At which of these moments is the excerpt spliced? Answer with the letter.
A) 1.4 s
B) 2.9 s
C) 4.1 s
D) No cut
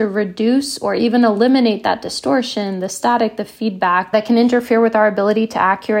C